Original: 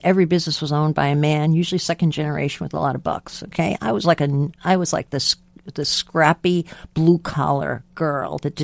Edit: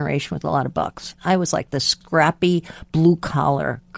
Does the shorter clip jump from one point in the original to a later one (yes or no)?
yes